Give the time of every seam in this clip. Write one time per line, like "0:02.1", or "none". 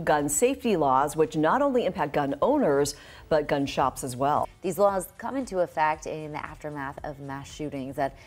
0:04.5